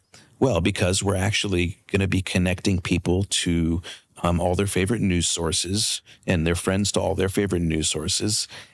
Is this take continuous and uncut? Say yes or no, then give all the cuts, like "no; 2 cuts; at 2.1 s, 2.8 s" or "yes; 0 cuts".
yes; 0 cuts